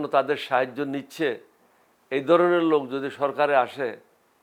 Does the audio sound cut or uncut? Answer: uncut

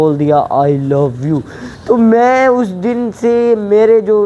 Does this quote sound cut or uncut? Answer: uncut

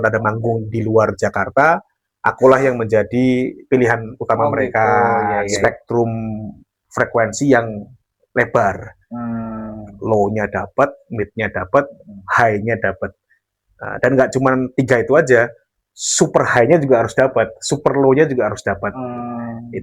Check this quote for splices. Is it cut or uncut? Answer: cut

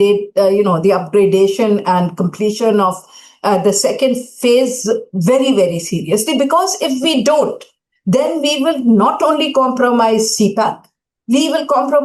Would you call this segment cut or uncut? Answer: uncut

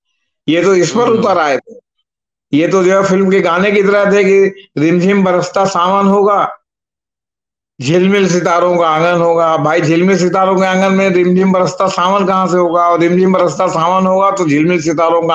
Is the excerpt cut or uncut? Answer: uncut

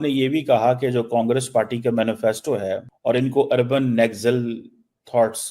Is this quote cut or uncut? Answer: cut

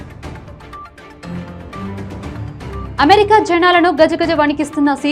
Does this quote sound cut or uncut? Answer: cut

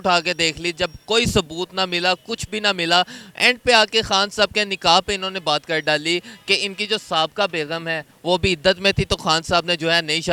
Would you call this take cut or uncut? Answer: uncut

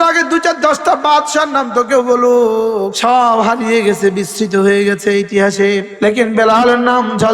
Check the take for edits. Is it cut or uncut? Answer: cut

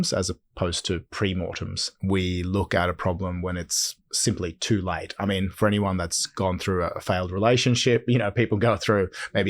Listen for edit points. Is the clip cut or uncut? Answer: cut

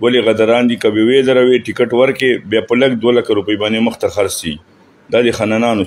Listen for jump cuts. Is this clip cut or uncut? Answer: uncut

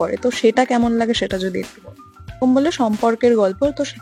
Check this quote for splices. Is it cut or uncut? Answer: cut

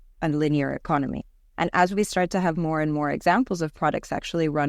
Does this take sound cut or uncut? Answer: uncut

